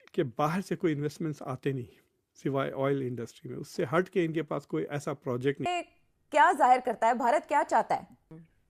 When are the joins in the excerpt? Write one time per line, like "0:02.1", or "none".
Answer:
0:05.7